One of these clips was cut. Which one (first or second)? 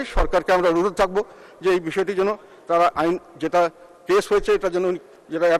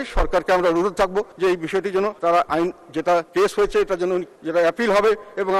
second